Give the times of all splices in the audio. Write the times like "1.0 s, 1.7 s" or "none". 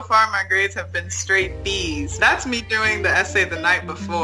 2.2 s